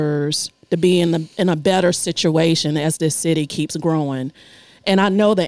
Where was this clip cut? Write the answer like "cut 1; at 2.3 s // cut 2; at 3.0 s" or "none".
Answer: none